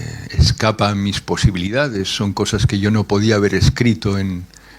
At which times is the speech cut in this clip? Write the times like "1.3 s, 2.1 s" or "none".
none